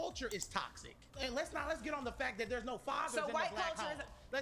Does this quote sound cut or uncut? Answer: cut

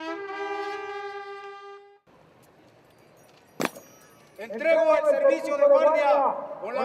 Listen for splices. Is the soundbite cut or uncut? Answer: uncut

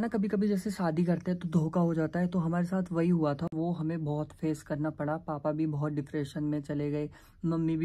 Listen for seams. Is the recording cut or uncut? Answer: uncut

